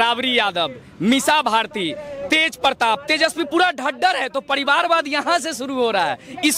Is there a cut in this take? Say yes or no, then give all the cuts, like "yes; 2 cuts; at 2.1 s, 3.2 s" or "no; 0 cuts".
no; 0 cuts